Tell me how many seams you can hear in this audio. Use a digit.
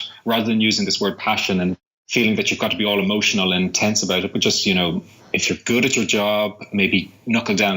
1